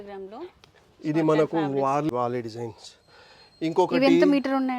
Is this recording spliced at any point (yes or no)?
yes